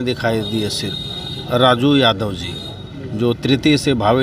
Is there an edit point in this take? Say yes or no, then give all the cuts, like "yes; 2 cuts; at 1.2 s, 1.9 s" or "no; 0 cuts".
no; 0 cuts